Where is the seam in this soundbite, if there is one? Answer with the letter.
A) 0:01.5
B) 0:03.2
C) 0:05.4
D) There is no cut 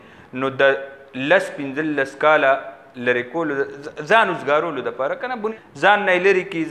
C